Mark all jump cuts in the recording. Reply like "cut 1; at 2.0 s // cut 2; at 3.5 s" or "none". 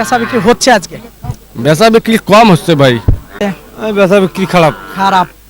cut 1; at 3.4 s